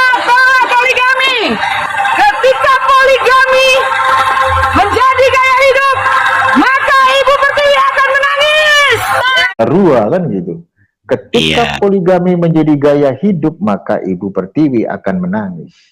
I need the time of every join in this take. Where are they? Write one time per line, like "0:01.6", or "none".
0:09.6